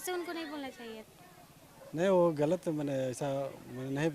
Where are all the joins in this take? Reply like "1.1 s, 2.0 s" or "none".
1.1 s

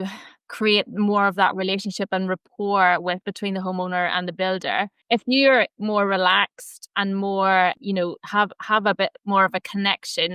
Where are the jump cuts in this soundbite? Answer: 5.0 s, 7.8 s

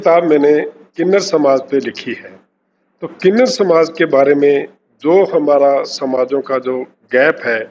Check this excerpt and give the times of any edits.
none

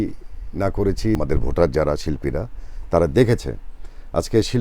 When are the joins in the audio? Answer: 1.2 s

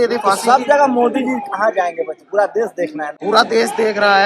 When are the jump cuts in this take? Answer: 3.1 s

